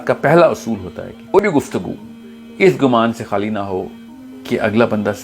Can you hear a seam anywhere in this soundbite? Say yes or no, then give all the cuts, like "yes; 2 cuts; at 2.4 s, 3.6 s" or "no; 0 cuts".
yes; 1 cut; at 1.4 s